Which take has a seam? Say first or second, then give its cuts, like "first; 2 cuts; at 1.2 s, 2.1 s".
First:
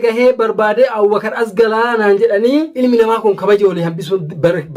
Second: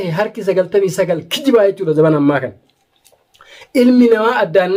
first; 1 cut; at 2.7 s